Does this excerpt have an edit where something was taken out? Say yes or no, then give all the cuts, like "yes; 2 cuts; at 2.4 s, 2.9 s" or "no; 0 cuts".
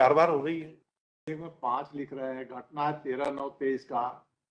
yes; 1 cut; at 1.3 s